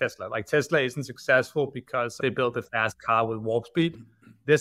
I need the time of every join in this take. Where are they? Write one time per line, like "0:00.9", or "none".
0:02.2